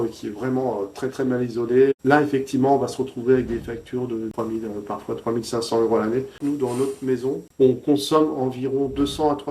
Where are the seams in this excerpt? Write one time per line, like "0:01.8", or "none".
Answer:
0:04.3
0:06.4
0:07.5

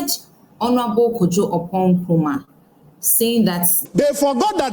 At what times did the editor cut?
0:03.7

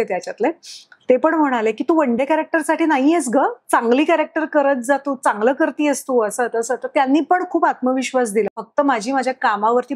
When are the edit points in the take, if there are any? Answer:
0:08.6

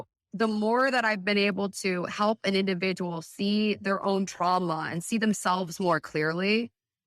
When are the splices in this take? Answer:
none

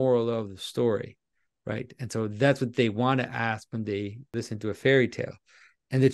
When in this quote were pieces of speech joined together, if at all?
0:04.3

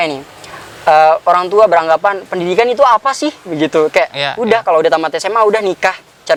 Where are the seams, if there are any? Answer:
none

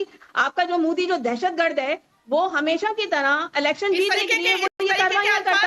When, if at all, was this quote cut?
none

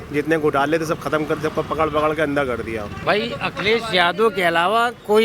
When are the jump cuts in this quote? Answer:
0:03.0

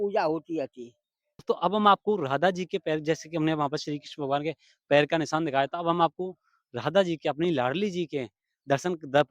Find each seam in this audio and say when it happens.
0:01.4

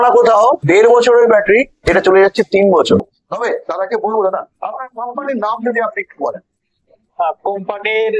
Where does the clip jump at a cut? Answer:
0:03.2

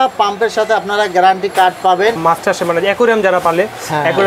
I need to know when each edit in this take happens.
0:02.2

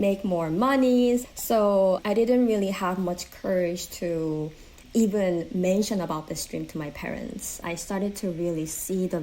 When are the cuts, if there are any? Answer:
0:01.7
0:04.8
0:07.6

